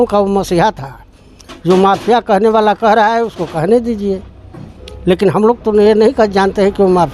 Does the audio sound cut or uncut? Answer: uncut